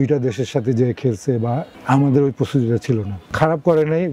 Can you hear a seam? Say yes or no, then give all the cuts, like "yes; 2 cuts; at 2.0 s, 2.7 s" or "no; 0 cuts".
yes; 2 cuts; at 1.7 s, 3.3 s